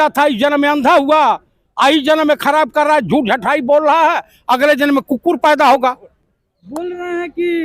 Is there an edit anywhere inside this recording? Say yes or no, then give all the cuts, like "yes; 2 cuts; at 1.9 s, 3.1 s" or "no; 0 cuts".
no; 0 cuts